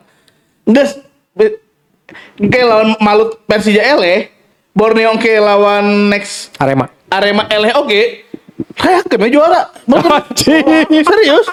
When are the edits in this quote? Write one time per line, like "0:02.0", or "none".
none